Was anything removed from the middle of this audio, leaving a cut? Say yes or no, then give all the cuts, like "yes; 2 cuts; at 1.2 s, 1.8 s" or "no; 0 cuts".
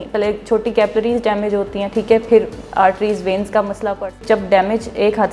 yes; 1 cut; at 4.2 s